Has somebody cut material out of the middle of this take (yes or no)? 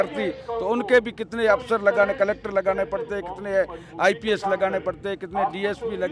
no